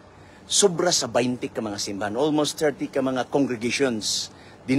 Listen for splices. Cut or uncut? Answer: uncut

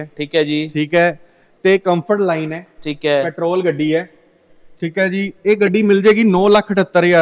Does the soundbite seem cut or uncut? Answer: uncut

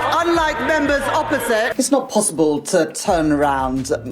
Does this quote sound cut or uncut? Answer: cut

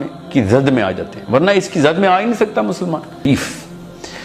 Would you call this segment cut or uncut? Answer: cut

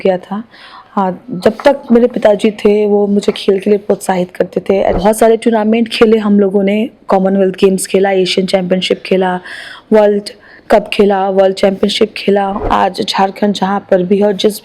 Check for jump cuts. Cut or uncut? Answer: cut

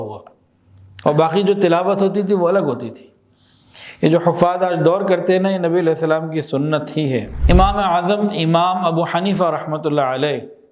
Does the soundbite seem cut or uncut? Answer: cut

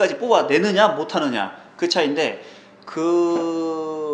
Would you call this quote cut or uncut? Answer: uncut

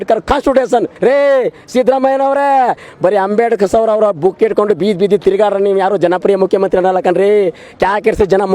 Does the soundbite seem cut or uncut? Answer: cut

